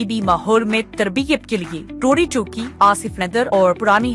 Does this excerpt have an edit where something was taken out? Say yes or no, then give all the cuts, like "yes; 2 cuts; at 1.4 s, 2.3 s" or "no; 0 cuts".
no; 0 cuts